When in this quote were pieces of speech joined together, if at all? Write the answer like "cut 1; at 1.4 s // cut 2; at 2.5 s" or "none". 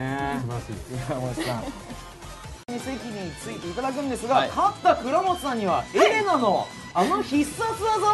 none